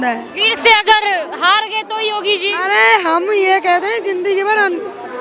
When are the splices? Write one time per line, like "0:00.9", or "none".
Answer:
none